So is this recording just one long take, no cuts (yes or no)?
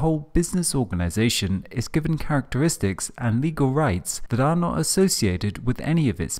no